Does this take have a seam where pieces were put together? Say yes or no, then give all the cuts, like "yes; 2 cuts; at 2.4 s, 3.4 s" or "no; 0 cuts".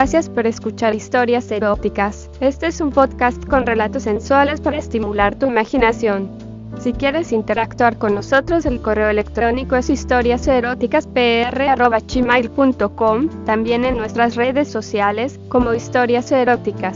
yes; 1 cut; at 1.0 s